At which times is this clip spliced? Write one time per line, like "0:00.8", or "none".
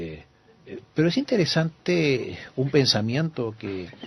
none